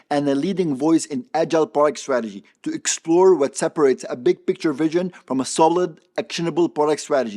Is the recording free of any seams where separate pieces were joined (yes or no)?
yes